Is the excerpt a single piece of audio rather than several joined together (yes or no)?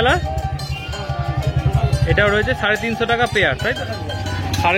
no